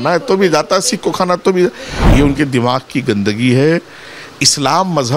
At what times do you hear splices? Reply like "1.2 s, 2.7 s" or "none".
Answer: 1.9 s